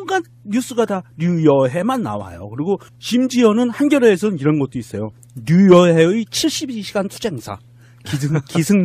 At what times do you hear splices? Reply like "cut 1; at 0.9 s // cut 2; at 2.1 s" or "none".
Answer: cut 1; at 2.9 s